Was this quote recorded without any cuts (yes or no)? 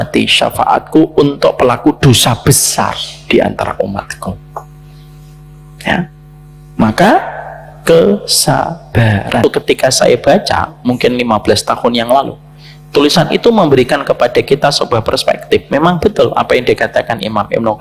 no